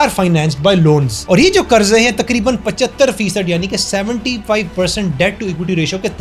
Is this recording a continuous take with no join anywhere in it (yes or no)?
yes